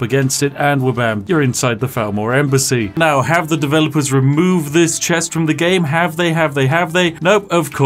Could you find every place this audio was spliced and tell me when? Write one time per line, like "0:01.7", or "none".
0:01.2
0:03.0